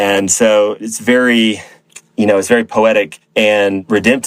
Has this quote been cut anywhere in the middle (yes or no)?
no